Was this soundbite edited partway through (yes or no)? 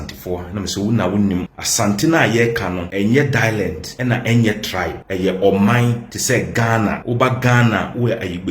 yes